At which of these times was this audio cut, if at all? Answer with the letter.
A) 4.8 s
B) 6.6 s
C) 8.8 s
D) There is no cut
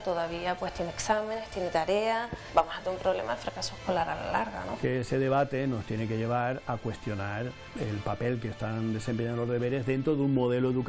A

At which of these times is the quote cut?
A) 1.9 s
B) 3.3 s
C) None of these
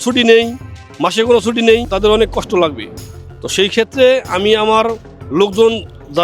A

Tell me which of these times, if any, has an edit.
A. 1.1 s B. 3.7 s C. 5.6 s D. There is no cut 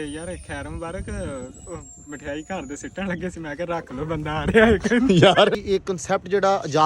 C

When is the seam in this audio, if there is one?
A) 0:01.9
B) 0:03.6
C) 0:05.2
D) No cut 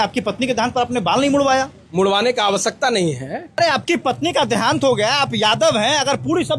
B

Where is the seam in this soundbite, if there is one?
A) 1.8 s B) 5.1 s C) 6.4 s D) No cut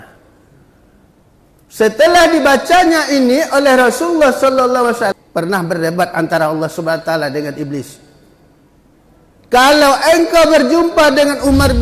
B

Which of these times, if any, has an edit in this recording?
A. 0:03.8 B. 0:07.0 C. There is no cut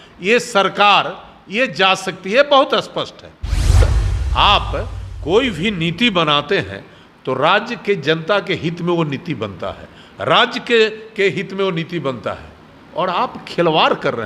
A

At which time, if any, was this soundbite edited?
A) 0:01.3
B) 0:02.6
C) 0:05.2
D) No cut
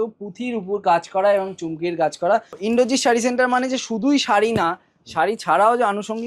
B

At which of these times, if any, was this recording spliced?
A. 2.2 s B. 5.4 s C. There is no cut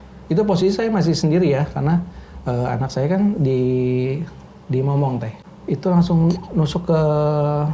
B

